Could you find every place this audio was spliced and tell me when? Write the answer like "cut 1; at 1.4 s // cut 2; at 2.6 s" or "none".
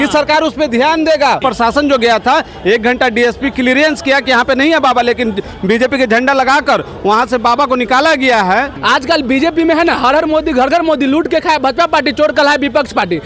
cut 1; at 1.4 s // cut 2; at 8.8 s